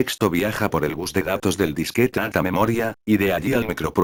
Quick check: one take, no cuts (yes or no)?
yes